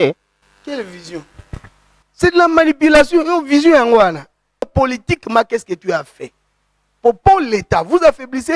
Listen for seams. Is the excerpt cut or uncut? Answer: cut